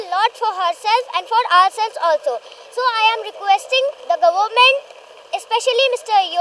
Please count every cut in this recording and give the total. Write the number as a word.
one